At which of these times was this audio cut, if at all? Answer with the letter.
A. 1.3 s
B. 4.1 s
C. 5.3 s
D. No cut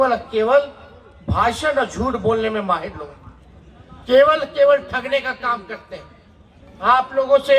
D